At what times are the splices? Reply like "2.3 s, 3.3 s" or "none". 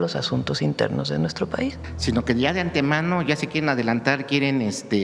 1.9 s